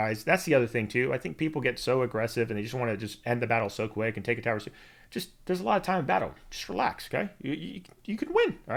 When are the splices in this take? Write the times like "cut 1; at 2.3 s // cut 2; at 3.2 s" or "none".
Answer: none